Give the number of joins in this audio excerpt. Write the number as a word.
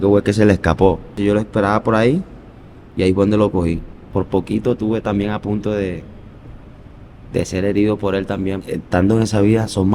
three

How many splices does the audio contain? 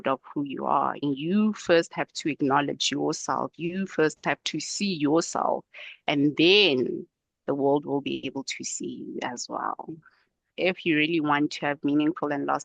two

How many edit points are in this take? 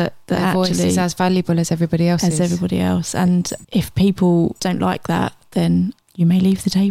two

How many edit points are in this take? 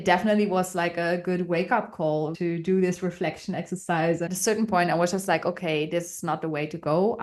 two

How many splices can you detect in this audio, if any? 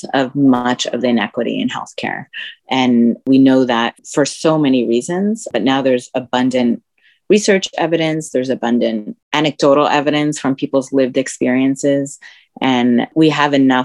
zero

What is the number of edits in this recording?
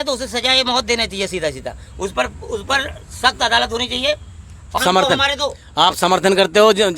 one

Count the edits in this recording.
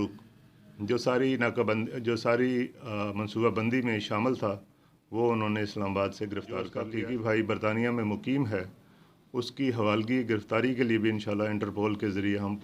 one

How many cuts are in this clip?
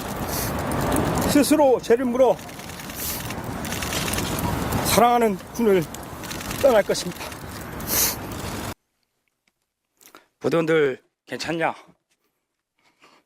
one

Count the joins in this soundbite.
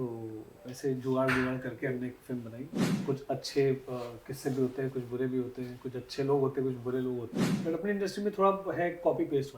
two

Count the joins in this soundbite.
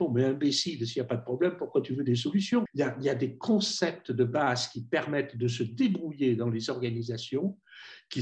one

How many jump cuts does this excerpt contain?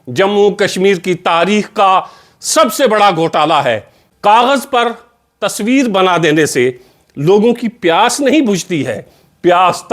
one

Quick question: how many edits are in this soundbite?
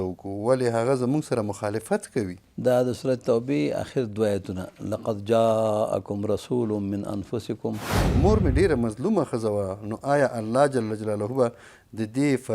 two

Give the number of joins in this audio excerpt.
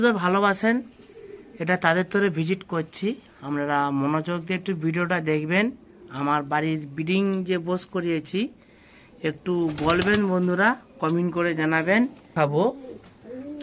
one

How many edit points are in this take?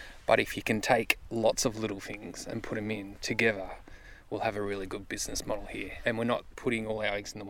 two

